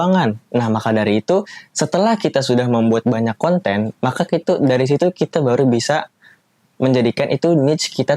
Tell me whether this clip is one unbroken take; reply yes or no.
yes